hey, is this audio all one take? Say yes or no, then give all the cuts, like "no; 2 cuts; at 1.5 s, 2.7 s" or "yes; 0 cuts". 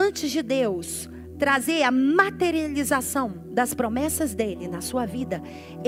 yes; 0 cuts